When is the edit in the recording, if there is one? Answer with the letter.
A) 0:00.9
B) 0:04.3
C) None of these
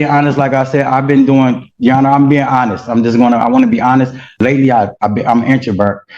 B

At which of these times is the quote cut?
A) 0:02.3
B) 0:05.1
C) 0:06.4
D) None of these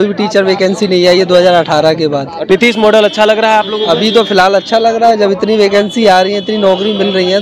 A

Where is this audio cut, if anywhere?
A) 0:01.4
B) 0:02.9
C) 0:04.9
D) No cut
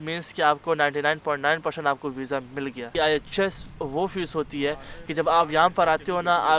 B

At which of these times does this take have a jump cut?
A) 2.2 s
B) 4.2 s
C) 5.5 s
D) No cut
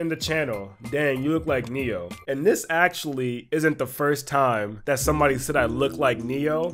A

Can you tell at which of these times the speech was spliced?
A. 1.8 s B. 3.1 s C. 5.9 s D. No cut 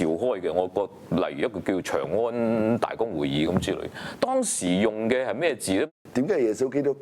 C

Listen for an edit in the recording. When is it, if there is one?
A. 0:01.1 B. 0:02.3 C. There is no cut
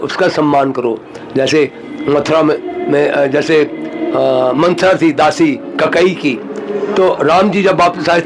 C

